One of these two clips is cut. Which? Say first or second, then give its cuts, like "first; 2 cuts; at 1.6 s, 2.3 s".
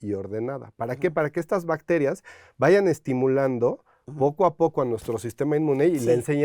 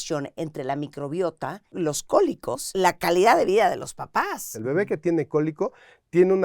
second; 3 cuts; at 1.6 s, 2.7 s, 4.5 s